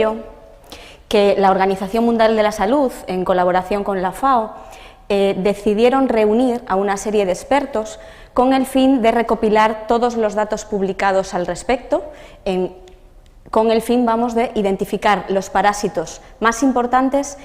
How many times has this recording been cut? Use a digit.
1